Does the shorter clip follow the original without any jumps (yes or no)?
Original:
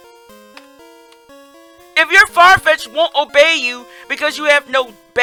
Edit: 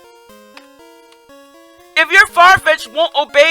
yes